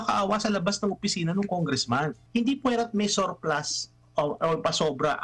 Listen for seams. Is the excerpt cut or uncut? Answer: cut